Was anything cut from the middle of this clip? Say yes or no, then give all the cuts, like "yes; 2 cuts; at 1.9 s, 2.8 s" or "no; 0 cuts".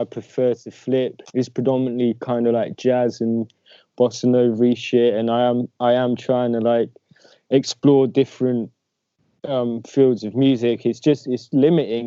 yes; 1 cut; at 1.2 s